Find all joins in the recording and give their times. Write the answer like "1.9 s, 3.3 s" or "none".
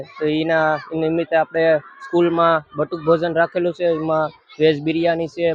none